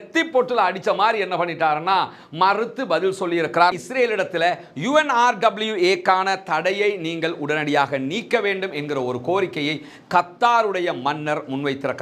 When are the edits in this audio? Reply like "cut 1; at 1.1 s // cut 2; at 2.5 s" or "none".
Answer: cut 1; at 3.8 s

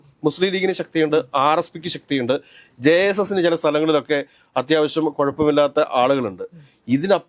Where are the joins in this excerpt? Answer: none

